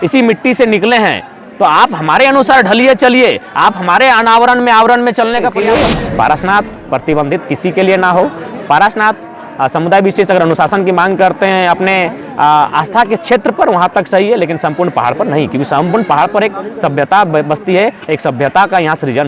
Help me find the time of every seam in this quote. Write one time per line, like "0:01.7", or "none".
0:05.5